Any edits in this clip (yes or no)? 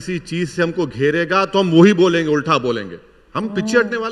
no